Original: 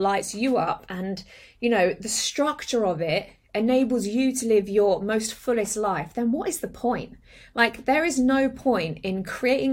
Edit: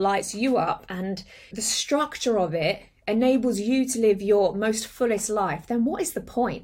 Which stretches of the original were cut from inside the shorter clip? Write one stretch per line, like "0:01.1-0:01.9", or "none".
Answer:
0:01.5-0:02.0